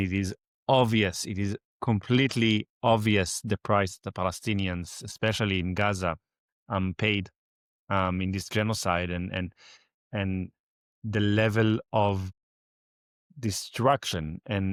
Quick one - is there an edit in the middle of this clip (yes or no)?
no